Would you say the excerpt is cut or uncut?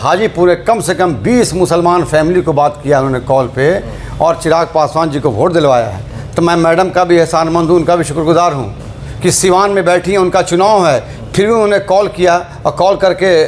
uncut